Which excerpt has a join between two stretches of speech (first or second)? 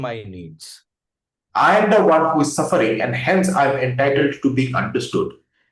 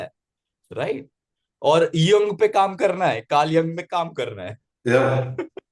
first